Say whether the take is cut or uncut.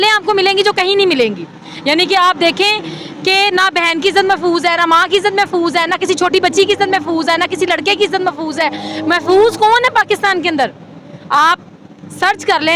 uncut